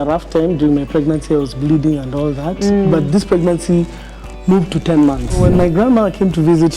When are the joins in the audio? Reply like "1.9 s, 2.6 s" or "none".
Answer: 5.4 s